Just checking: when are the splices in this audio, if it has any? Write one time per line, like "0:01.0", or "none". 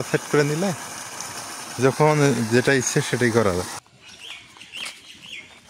0:03.8